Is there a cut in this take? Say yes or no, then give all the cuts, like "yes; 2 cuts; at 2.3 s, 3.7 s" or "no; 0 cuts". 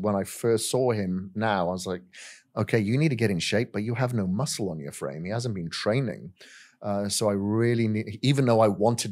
no; 0 cuts